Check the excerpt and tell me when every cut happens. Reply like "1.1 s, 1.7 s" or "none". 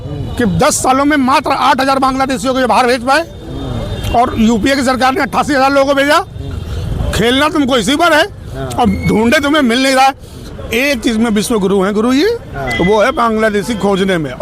none